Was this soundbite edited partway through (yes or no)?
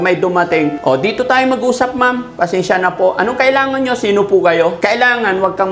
yes